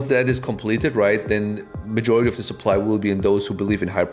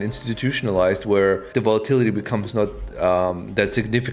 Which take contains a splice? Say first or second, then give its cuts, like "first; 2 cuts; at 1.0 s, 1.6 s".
second; 1 cut; at 1.5 s